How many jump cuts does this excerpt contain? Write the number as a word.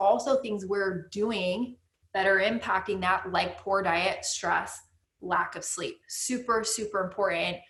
zero